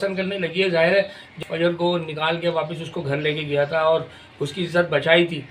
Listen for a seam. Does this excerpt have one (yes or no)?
yes